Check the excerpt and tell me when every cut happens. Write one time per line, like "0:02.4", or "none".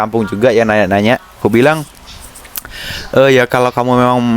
0:01.4